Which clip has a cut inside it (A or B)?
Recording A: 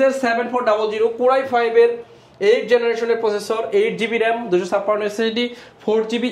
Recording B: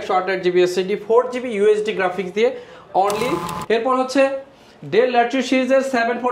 B